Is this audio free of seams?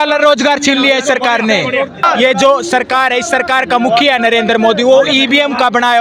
no; 1 cut; at 2.0 s

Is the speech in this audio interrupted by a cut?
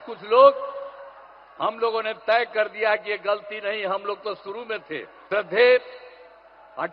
yes; 1 cut; at 5.1 s

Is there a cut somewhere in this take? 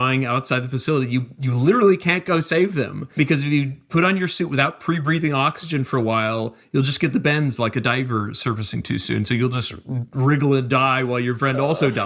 yes; 1 cut; at 3.1 s

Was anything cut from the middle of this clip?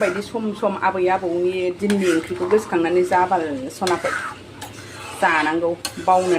no; 0 cuts

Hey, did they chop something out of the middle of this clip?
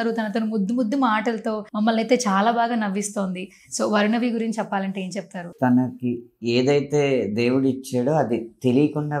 yes; 2 cuts; at 1.7 s, 5.5 s

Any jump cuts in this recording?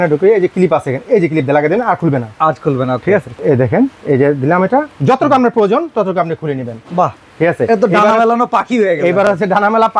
no; 0 cuts

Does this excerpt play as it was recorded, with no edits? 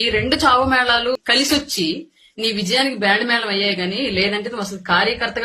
no; 1 cut; at 1.2 s

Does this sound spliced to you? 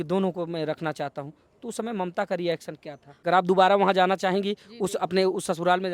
yes; 1 cut; at 3.2 s

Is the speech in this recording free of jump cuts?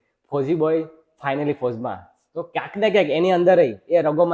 yes; 0 cuts

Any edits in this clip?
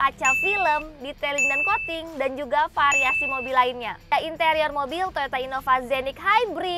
yes; 1 cut; at 4.1 s

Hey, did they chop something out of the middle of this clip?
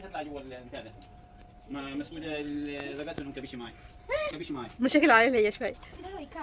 no; 0 cuts

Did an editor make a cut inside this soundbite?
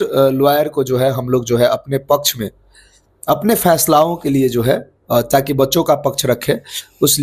no; 0 cuts

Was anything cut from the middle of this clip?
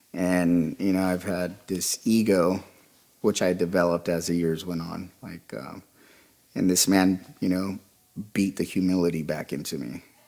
no; 0 cuts

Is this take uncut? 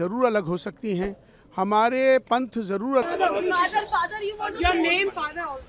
no; 1 cut; at 3.0 s

